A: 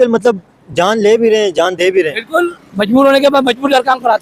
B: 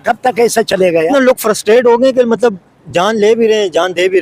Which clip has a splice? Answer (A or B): B